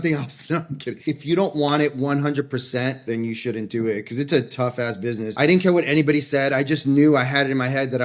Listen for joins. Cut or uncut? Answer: cut